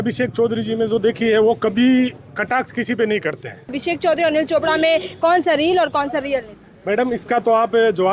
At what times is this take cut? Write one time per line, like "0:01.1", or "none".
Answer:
0:03.8